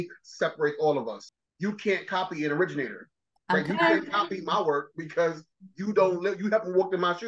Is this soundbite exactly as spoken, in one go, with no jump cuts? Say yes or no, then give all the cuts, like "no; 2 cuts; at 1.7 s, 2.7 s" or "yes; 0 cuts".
no; 1 cut; at 1.3 s